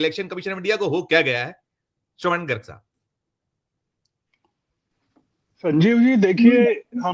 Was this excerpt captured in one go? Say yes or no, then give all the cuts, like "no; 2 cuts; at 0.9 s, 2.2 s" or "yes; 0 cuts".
yes; 0 cuts